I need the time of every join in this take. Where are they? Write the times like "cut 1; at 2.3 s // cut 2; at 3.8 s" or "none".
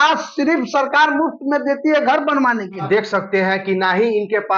cut 1; at 2.8 s

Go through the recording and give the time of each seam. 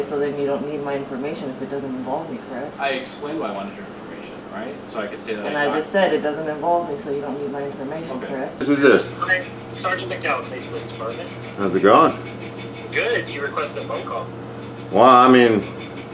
cut 1; at 8.6 s

